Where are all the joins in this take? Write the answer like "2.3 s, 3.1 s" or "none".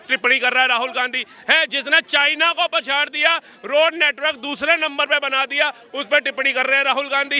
none